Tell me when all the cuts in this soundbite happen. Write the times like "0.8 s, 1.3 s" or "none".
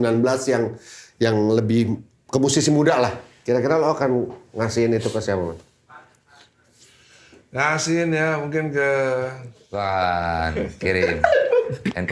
9.5 s